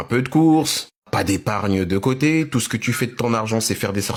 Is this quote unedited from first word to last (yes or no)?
yes